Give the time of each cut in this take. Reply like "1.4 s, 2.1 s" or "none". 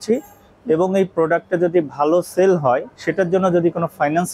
3.0 s